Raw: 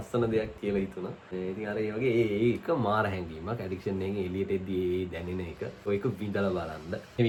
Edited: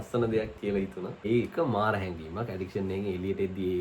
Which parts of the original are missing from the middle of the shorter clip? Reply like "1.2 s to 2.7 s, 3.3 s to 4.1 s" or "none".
1.2 s to 2.4 s